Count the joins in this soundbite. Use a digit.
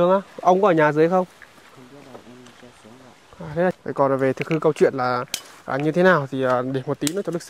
1